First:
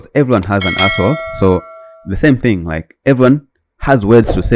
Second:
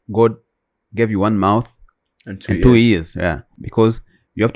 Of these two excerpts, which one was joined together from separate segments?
second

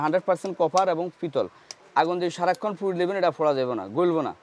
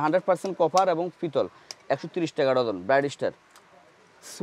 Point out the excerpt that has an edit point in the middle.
first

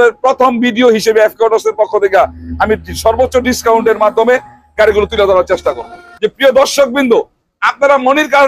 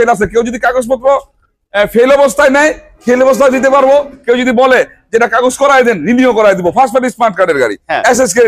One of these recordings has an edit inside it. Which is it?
first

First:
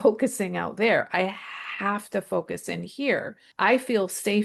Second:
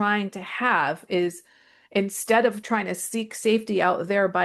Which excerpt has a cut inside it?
first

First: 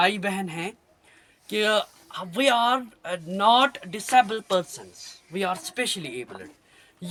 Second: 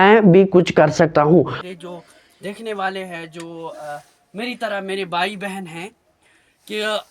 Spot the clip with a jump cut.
second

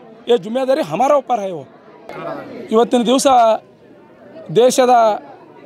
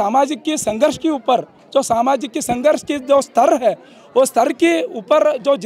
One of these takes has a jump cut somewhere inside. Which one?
first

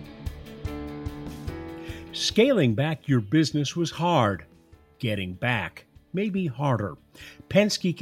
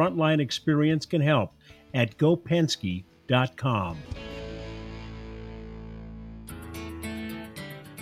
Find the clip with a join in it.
second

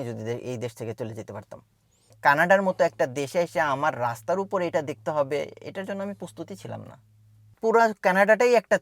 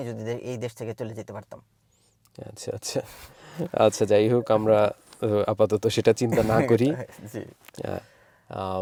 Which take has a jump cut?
first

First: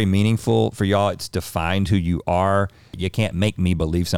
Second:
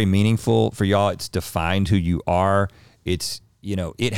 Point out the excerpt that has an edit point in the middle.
first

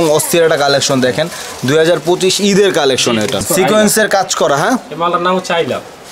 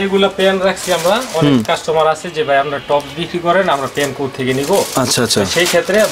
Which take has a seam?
first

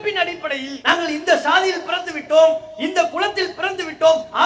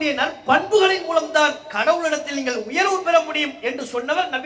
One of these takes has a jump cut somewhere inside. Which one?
second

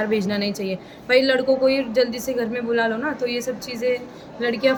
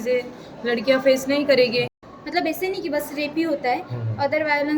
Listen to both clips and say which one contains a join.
second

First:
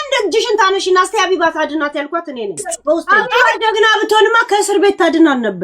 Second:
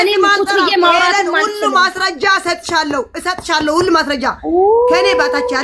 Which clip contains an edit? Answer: first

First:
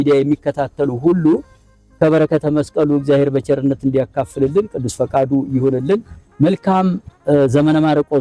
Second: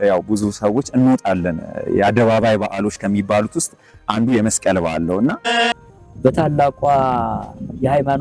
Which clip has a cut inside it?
second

